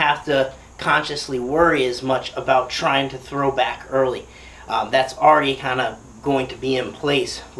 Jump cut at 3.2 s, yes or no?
no